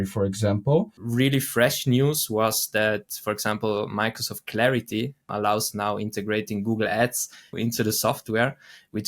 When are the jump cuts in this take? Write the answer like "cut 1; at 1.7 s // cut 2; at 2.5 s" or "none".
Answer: cut 1; at 1.0 s // cut 2; at 5.3 s // cut 3; at 7.6 s